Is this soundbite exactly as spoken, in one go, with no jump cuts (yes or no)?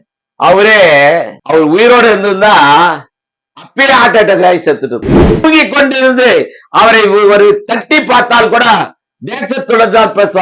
no